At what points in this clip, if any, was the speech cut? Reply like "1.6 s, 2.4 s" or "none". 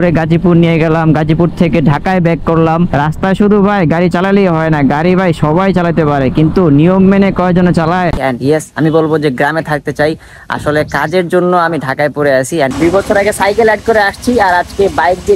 2.9 s, 8.2 s, 12.7 s